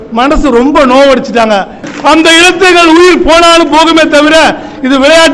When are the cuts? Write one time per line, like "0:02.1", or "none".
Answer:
0:01.9